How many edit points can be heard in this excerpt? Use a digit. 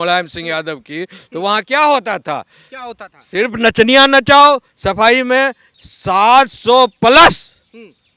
1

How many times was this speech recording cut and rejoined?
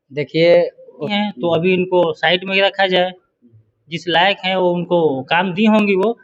1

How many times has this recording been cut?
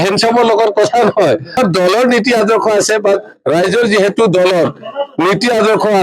1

